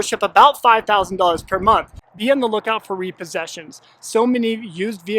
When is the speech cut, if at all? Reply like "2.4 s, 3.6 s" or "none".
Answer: 2.0 s